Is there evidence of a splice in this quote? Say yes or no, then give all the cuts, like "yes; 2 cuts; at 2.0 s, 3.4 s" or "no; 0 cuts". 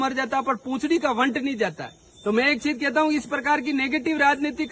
no; 0 cuts